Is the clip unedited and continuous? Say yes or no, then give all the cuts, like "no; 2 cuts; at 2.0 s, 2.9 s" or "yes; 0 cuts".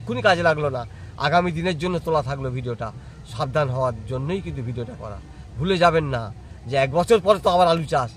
yes; 0 cuts